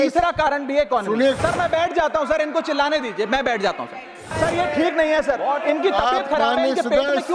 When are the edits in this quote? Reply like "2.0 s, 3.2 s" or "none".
1.4 s, 4.3 s